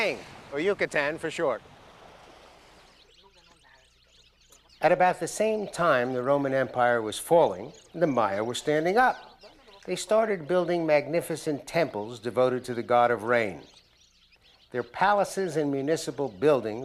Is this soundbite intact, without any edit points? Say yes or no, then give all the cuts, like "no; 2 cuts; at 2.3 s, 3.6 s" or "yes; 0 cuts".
no; 1 cut; at 2.1 s